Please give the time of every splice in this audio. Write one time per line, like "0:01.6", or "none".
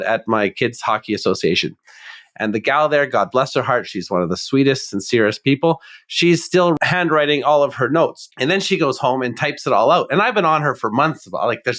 0:06.8
0:08.2